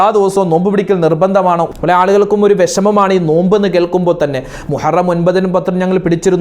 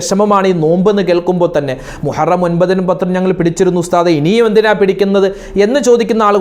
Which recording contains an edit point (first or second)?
first